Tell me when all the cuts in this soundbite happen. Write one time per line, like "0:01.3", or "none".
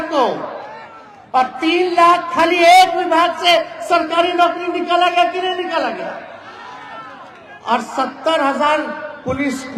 none